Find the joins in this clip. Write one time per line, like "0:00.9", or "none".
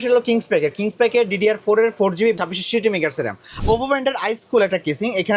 0:03.6